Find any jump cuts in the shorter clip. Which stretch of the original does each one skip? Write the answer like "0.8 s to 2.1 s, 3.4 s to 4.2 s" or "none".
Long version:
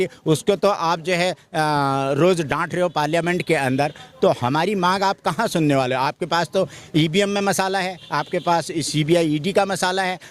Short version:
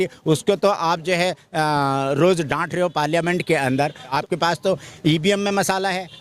4.1 s to 6.0 s